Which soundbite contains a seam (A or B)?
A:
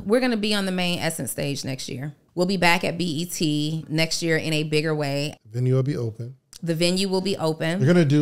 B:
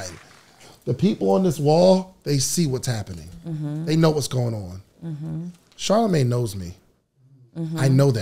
A